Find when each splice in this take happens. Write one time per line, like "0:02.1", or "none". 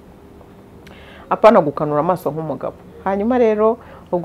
none